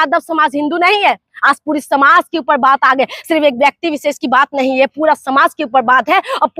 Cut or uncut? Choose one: uncut